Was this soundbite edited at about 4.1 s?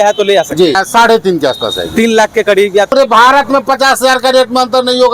no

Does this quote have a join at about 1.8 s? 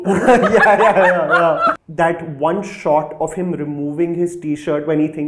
yes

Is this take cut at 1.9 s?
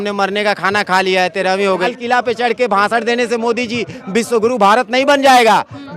yes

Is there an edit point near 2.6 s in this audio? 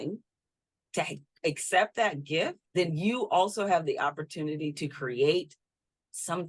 yes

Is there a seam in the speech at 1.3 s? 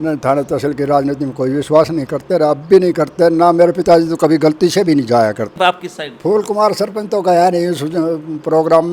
no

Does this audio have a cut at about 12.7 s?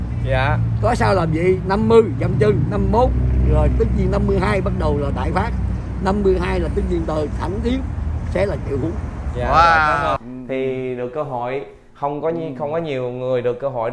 no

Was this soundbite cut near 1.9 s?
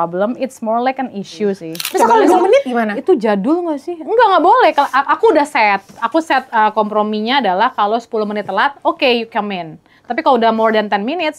yes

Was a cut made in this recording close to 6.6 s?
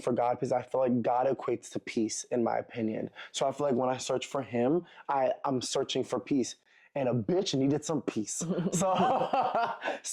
no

